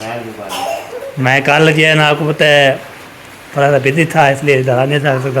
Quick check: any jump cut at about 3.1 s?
no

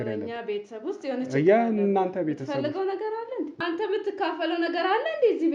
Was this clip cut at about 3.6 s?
yes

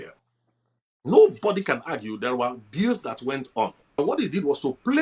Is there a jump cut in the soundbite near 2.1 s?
no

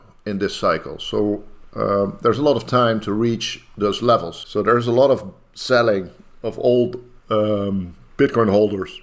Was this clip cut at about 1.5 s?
no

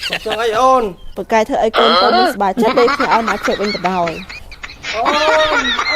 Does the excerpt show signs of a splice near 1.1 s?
yes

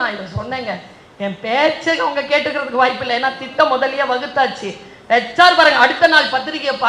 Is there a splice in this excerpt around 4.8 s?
no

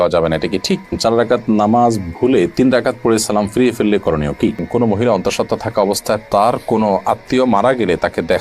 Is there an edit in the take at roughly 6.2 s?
no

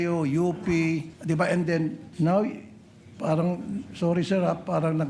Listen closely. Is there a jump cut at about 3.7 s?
no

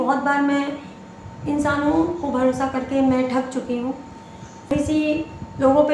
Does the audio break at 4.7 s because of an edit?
yes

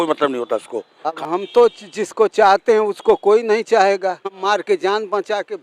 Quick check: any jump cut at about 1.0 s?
yes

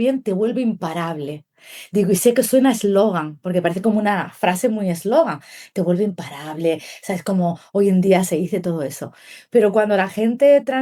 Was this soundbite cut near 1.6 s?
no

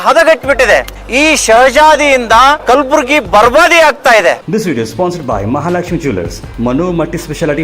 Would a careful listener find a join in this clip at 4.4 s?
yes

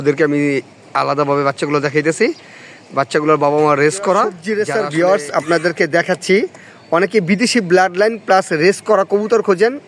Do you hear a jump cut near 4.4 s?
yes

